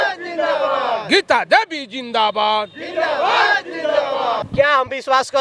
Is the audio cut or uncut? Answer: cut